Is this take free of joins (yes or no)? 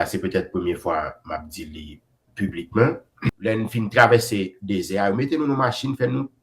no